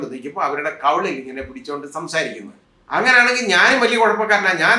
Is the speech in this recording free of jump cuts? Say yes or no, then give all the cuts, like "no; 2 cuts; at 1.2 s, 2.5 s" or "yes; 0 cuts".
no; 1 cut; at 2.6 s